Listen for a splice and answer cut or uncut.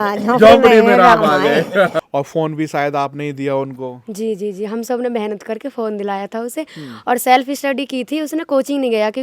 cut